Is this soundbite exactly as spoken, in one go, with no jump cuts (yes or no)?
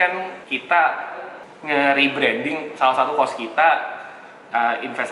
yes